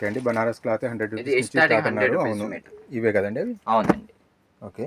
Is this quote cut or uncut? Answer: uncut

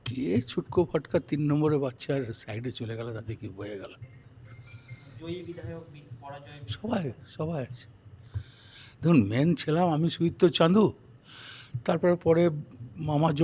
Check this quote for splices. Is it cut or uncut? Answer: uncut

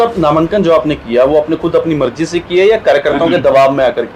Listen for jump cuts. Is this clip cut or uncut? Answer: uncut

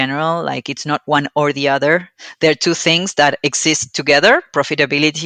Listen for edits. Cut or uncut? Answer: uncut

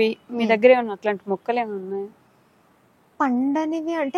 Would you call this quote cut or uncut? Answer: uncut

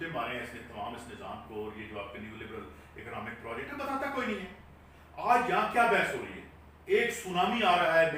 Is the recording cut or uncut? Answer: uncut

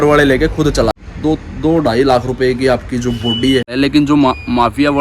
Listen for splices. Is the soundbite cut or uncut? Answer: cut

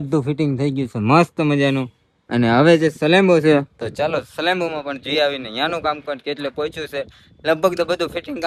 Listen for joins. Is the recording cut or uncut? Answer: uncut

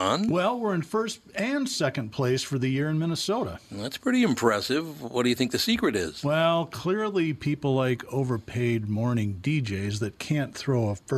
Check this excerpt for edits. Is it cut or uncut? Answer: uncut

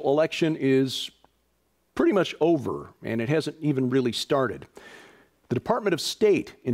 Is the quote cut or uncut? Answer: uncut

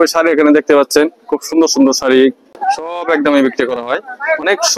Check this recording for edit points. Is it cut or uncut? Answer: cut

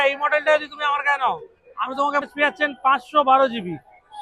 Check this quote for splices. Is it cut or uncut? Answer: cut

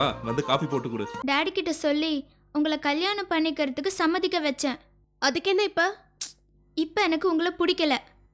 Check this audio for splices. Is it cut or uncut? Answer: cut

